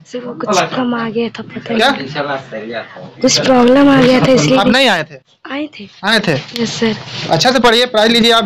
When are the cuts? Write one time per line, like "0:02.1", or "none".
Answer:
none